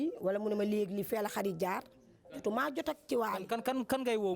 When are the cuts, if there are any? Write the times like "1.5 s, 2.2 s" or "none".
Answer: none